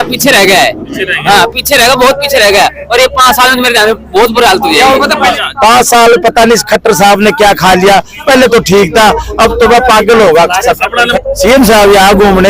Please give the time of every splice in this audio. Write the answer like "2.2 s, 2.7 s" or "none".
5.4 s, 11.1 s